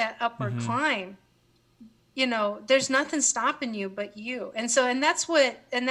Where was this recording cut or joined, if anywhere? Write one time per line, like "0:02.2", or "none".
none